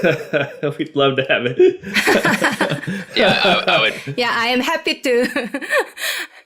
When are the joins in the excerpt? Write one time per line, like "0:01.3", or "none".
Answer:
none